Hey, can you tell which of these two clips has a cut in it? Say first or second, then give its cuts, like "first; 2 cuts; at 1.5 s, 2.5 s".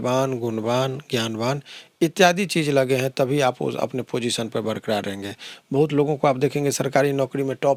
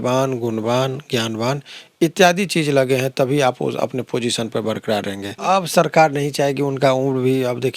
second; 1 cut; at 5.4 s